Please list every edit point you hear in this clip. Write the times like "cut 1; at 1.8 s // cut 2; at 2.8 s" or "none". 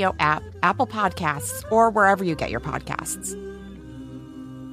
cut 1; at 3.0 s